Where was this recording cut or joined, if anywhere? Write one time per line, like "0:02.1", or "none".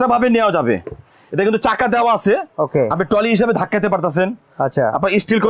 none